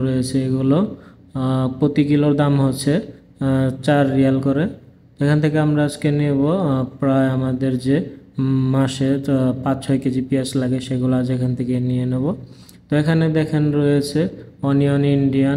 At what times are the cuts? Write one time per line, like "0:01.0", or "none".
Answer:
none